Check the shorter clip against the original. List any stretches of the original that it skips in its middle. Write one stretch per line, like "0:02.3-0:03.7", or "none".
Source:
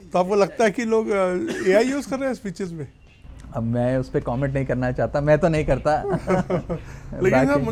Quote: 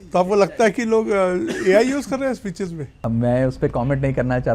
0:02.9-0:03.4